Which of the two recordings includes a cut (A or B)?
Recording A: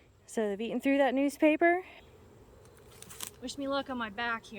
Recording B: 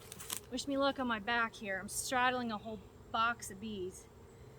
A